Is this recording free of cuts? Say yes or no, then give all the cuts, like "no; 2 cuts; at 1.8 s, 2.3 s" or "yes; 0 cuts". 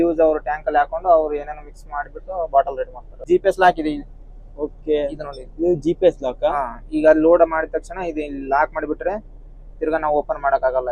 no; 1 cut; at 3.2 s